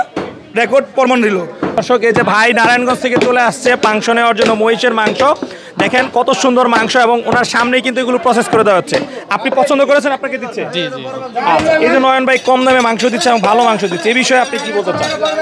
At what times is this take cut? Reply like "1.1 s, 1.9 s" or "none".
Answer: 1.8 s